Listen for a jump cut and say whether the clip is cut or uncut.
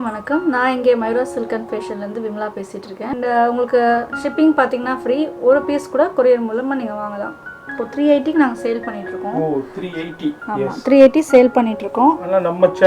cut